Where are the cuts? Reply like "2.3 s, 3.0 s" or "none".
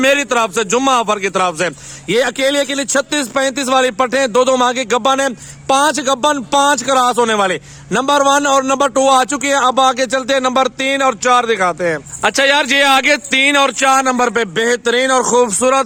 none